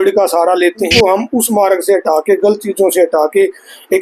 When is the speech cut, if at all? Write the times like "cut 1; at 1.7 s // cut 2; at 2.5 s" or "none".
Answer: cut 1; at 0.9 s